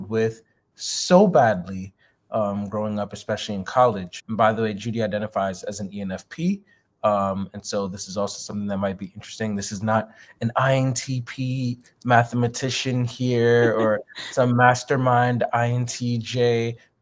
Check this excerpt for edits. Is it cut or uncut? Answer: cut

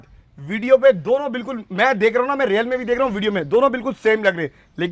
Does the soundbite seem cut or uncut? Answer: uncut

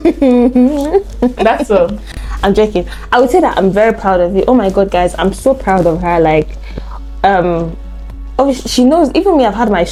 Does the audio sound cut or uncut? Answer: uncut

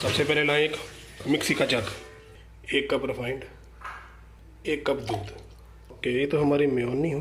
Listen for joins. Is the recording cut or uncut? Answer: cut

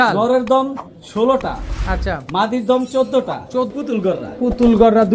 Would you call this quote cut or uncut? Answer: cut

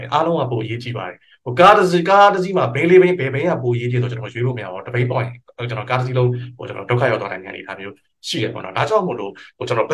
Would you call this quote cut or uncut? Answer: uncut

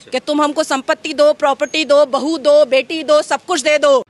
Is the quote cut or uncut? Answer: uncut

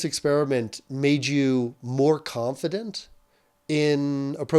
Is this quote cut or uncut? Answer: uncut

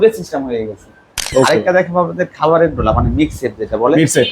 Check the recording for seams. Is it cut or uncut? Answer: cut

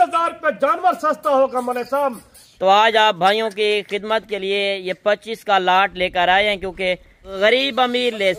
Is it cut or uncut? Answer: cut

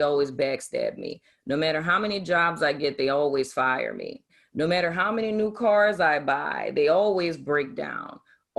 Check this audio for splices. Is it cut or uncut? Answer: cut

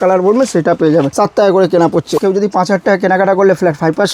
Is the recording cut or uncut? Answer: cut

